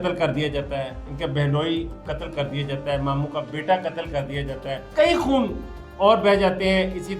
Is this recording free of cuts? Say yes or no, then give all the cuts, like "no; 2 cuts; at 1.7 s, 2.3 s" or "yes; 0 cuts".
no; 2 cuts; at 1.0 s, 4.7 s